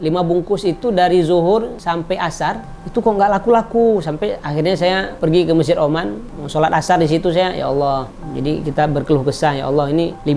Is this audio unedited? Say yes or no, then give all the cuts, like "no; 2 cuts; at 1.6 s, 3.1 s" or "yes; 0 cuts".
yes; 0 cuts